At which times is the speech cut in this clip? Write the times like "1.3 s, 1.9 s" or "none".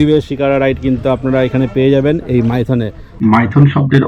3.1 s